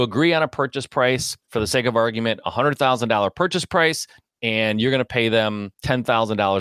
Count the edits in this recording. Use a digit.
2